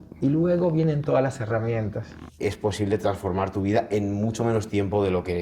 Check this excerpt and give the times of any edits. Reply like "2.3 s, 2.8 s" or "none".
2.3 s